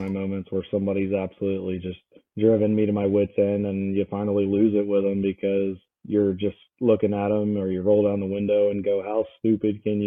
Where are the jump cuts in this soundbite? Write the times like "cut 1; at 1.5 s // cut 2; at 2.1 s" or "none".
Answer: none